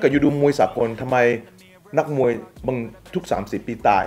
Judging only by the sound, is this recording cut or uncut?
uncut